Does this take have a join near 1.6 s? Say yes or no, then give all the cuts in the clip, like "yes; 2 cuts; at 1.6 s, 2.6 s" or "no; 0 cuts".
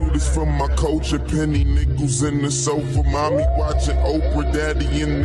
yes; 1 cut; at 1.6 s